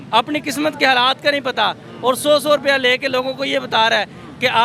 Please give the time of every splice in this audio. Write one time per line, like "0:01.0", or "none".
none